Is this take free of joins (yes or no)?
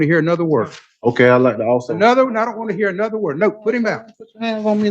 yes